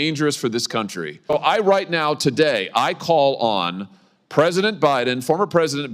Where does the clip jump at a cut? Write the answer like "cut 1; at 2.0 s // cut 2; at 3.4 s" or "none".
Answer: cut 1; at 1.3 s